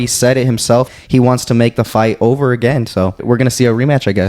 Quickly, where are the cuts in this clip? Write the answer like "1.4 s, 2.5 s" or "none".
0.9 s, 3.2 s